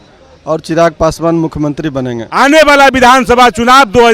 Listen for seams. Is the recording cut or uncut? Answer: cut